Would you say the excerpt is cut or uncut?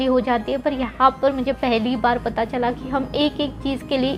uncut